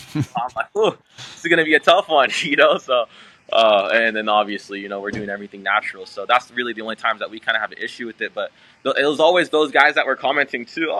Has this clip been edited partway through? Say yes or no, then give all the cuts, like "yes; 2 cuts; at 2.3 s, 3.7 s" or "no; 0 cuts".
no; 0 cuts